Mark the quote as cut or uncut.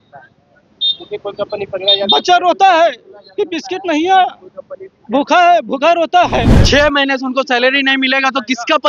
cut